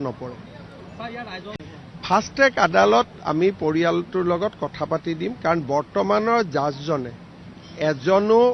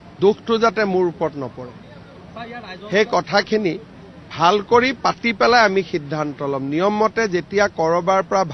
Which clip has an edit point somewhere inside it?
first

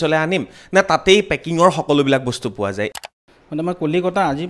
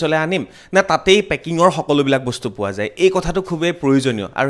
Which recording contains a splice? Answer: first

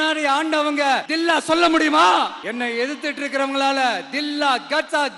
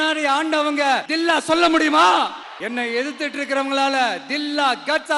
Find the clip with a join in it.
first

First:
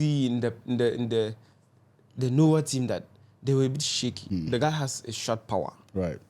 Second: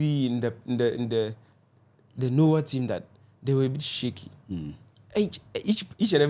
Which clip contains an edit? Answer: first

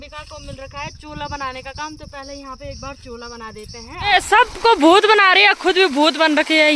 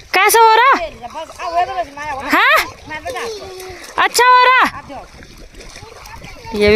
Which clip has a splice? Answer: first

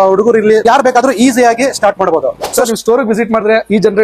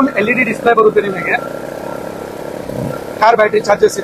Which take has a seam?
first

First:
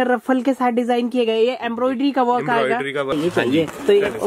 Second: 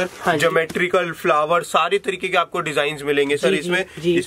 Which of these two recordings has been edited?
first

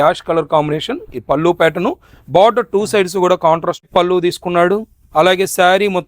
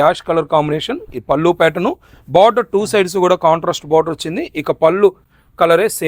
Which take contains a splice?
first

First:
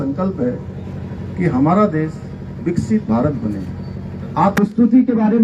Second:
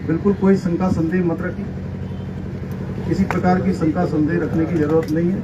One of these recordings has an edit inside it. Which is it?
first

